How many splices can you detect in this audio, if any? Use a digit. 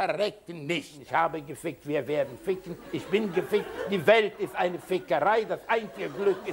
1